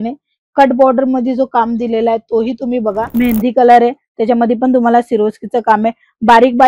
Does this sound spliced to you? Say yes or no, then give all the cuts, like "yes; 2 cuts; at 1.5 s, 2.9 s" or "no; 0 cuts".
yes; 1 cut; at 3.0 s